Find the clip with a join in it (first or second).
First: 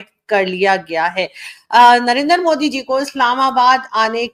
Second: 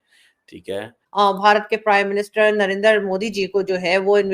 second